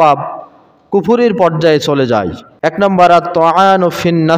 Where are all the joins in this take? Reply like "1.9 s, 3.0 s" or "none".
2.8 s